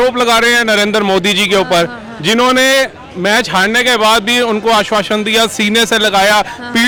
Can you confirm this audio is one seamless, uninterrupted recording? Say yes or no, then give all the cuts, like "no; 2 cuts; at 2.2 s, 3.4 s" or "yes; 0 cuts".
yes; 0 cuts